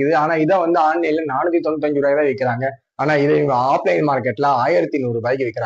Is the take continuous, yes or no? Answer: yes